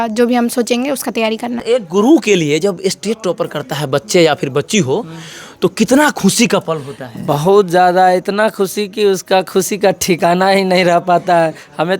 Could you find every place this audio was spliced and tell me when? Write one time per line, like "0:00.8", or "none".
0:01.6